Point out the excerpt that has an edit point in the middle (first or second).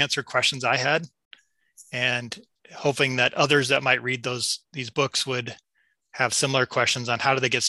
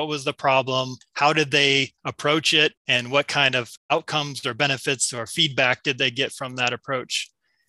second